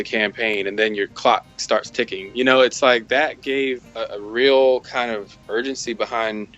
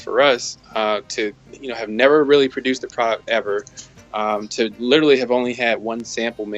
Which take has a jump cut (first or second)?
first